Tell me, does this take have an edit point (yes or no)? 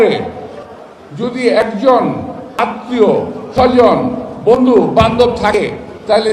no